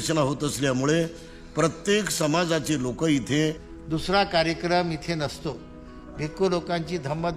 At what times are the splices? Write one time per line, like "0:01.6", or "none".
0:03.7